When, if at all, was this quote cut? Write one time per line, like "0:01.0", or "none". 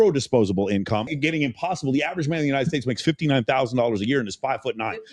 0:01.1